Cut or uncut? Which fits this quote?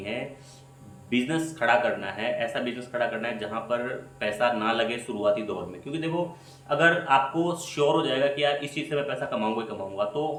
uncut